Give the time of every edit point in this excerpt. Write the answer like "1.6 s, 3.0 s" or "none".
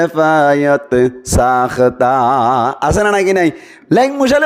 none